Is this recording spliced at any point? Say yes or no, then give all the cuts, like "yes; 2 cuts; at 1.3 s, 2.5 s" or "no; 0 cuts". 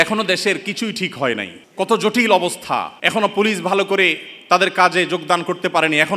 yes; 2 cuts; at 1.6 s, 3.0 s